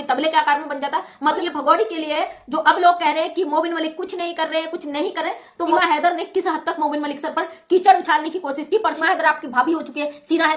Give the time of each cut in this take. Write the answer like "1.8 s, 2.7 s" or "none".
1.4 s, 5.7 s, 9.0 s